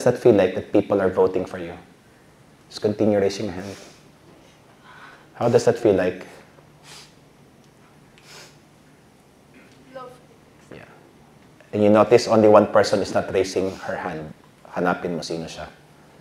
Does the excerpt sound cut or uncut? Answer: uncut